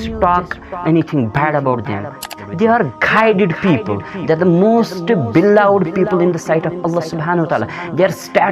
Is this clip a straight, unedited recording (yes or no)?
no